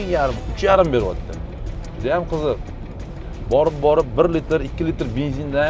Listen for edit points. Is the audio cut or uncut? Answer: uncut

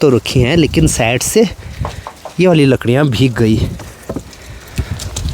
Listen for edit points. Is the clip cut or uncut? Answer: uncut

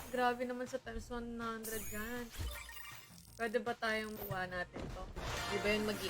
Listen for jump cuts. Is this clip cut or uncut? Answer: cut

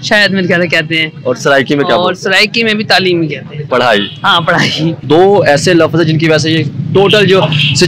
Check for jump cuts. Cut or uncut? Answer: cut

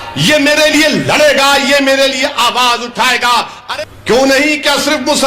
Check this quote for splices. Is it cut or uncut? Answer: cut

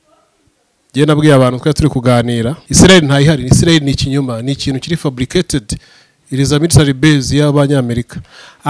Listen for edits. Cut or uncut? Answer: cut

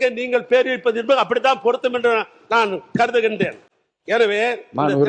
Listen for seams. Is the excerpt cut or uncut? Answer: uncut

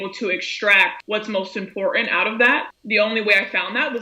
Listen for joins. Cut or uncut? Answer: cut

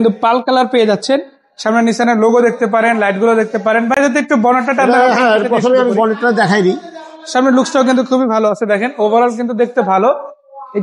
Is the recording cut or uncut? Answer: uncut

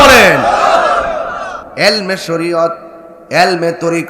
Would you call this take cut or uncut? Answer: cut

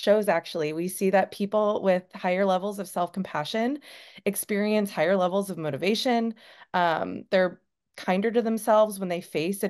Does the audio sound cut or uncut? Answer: uncut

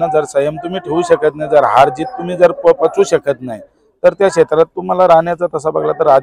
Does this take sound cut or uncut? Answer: uncut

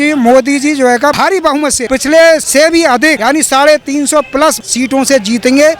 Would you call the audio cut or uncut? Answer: cut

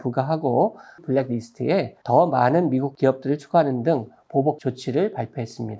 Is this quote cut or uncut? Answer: cut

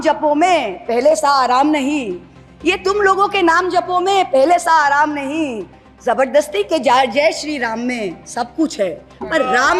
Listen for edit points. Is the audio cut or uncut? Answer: uncut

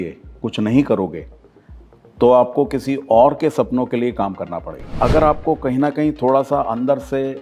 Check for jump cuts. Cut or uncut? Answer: cut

